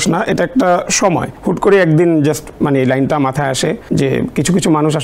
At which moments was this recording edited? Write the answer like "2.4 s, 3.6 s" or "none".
1.3 s, 3.8 s